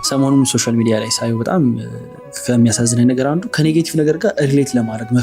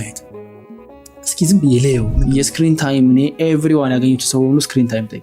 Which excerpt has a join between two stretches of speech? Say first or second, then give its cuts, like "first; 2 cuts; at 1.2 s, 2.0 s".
second; 1 cut; at 2.1 s